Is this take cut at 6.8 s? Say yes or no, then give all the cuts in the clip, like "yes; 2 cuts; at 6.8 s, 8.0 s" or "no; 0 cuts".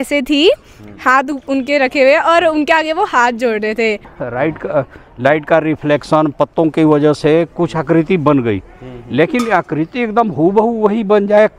no; 1 cut; at 4.2 s